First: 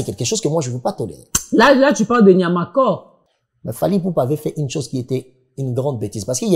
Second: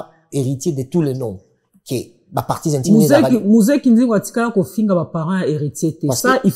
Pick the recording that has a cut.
first; 1 cut; at 3.1 s

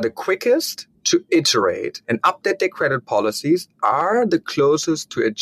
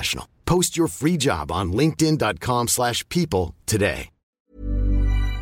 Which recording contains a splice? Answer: second; 1 cut; at 4.2 s

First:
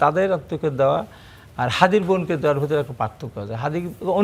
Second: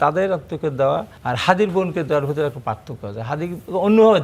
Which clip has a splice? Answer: second; 1 cut; at 1.1 s

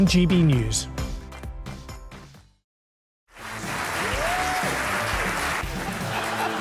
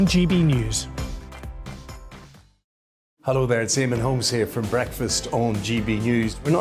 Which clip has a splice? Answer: first; 1 cut; at 3.1 s

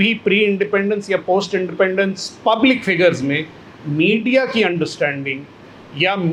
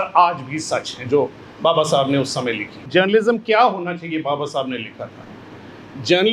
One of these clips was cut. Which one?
second; 1 cut; at 2.8 s

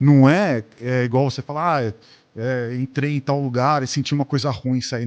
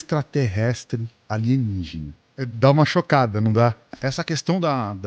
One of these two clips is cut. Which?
second; 2 cuts; at 2.5 s, 4.0 s

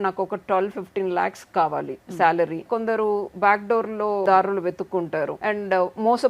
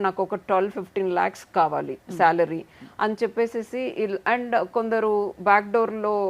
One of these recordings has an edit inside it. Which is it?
first; 3 cuts; at 2.6 s, 4.2 s, 5.4 s

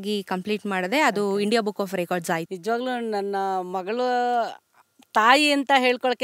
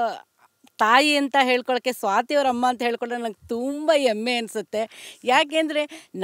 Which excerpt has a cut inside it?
first; 1 cut; at 2.5 s

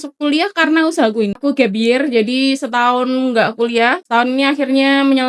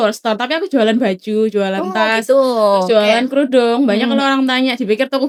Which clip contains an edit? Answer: first; 2 cuts; at 1.4 s, 4.0 s

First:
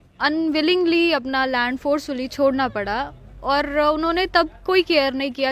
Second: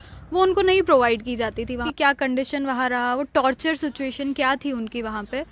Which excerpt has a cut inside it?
second; 1 cut; at 1.9 s

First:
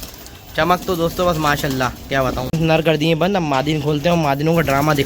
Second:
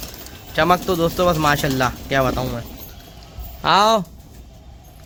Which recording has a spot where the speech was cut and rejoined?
first; 1 cut; at 2.4 s

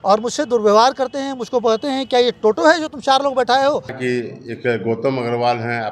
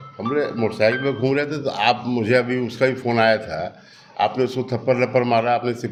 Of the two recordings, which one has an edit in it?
first; 1 cut; at 4.0 s

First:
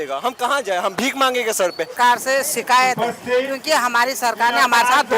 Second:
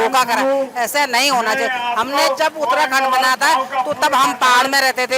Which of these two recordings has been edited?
first; 1 cut; at 1.9 s

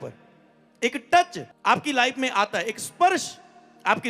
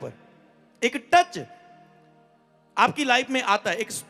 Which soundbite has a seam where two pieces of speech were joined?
first; 1 cut; at 1.4 s

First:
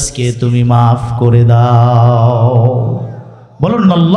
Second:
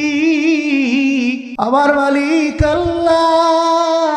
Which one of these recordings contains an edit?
second; 1 cut; at 1.5 s

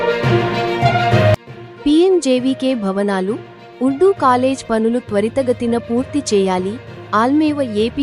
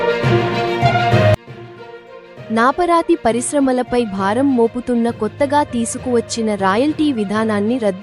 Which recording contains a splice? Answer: second; 1 cut; at 1.4 s

